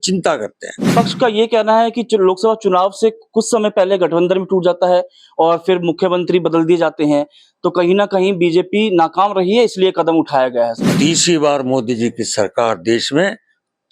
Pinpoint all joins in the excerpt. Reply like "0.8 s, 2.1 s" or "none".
0.9 s, 10.9 s